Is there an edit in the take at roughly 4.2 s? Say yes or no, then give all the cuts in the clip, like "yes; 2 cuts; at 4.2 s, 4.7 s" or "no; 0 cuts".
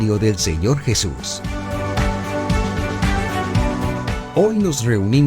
yes; 2 cuts; at 1.2 s, 4.2 s